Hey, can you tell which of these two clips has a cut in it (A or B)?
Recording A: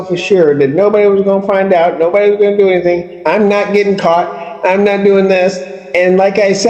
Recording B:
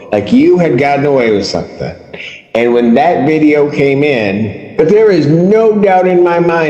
B